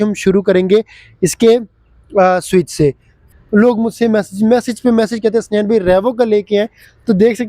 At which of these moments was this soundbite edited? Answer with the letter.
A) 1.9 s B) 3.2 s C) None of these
B